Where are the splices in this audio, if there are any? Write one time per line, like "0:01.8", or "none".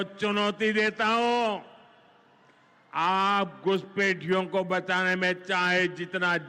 none

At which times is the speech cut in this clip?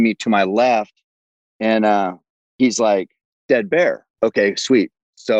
0:04.1

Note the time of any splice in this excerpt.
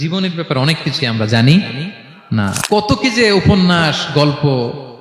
0:02.6

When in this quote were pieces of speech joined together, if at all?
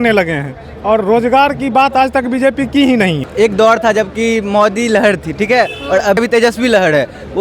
0:03.2
0:06.2

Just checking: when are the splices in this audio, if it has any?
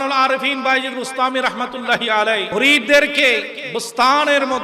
0:02.4

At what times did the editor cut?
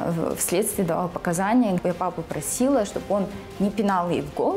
0:01.8

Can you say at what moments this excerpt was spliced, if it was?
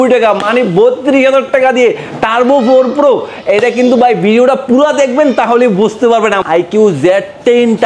0:06.4

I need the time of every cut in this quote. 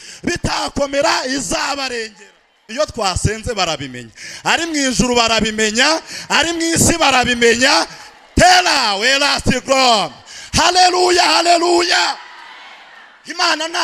0:02.7

